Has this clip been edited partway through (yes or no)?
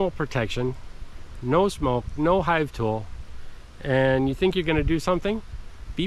no